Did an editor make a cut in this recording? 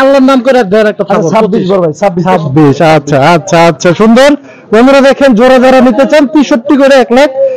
no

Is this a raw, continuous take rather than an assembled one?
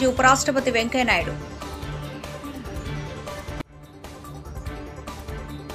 no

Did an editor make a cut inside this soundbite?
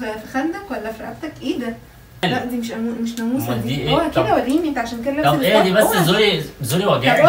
yes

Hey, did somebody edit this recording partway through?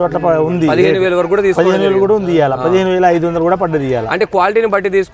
no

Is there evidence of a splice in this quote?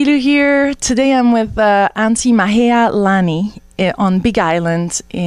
no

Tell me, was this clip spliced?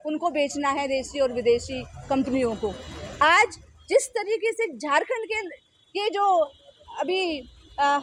no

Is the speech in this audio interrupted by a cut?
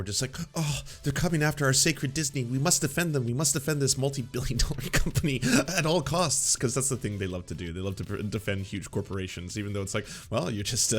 no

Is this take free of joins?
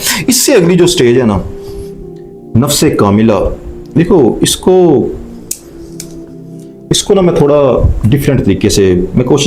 yes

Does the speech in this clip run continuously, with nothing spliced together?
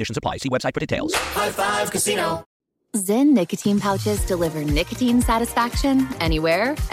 no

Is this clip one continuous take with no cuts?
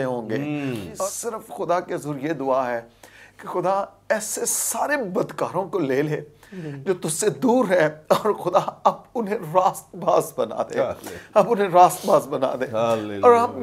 no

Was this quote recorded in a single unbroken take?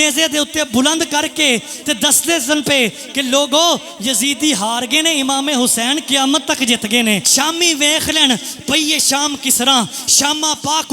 no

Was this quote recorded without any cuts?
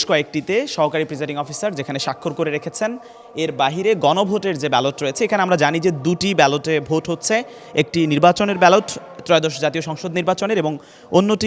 yes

